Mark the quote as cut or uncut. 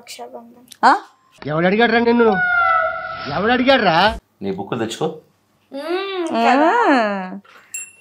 cut